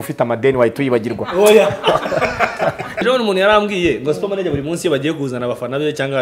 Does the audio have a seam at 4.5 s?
no; 1 cut; at 3.0 s

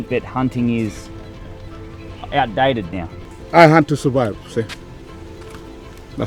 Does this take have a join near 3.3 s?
yes; 1 cut; at 3.3 s

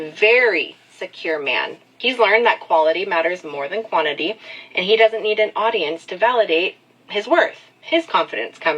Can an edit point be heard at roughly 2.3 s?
yes; 1 cut; at 2.3 s

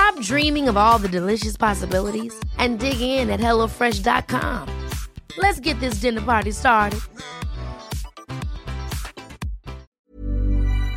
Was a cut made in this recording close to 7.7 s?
no; 1 cut; at 9.9 s

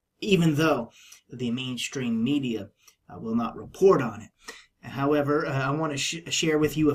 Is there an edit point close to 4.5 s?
no; 1 cut; at 1.3 s

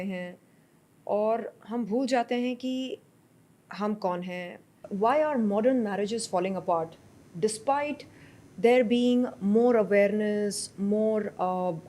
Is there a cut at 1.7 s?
no; 1 cut; at 4.8 s

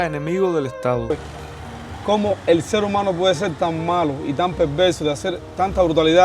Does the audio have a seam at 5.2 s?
no; 1 cut; at 1.1 s

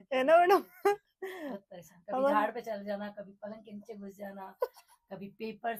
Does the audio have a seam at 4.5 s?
no; 0 cuts

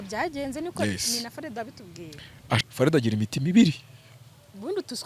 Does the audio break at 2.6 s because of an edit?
yes; 1 cut; at 2.6 s

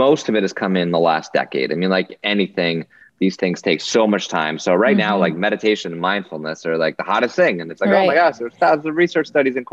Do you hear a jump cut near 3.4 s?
yes; 1 cut; at 3.4 s

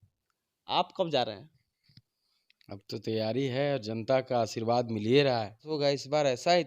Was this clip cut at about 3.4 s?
no; 1 cut; at 5.7 s

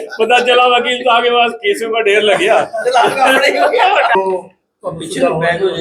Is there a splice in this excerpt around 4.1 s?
yes; 1 cut; at 4.1 s

